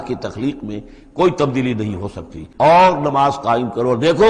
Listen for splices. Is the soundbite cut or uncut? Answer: cut